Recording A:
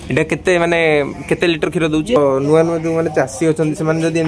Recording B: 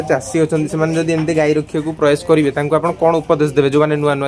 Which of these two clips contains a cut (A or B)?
A